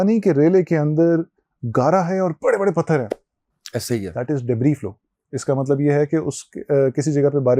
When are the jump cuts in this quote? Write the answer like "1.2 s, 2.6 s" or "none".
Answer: none